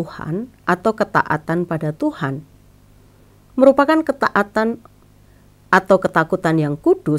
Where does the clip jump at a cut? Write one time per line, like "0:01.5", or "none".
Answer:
none